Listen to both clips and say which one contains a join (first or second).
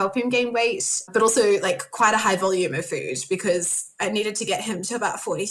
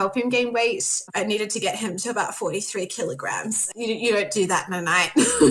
second